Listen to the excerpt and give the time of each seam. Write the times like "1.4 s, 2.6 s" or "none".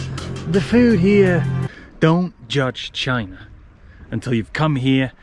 1.6 s